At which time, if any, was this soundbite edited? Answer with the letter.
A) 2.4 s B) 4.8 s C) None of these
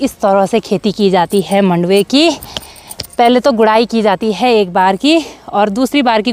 C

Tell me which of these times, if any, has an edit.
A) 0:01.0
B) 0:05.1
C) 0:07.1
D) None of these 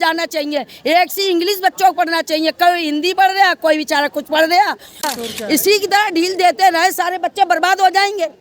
B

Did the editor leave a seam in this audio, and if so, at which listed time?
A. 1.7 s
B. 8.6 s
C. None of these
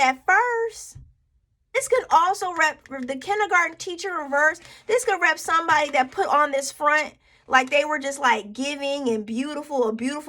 A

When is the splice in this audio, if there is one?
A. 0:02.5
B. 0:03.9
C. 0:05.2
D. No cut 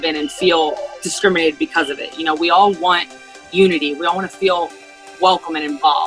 B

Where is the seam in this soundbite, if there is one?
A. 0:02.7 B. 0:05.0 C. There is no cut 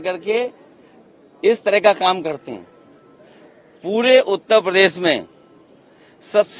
C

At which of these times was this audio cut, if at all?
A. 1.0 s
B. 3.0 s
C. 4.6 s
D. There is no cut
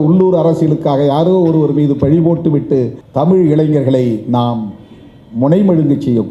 B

